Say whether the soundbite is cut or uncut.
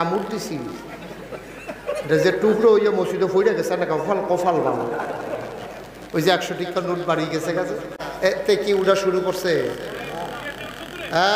cut